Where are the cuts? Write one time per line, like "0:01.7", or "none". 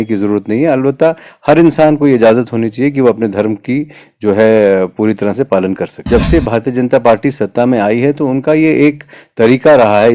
0:06.0